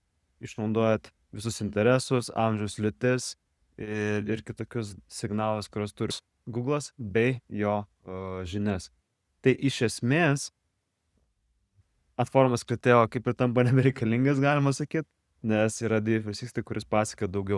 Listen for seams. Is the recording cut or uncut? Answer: cut